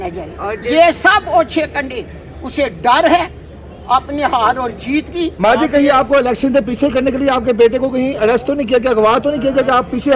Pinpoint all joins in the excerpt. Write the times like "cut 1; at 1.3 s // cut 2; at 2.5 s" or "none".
cut 1; at 5.3 s